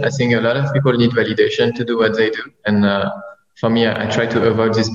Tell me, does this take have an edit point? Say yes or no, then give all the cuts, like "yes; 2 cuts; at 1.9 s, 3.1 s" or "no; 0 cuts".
no; 0 cuts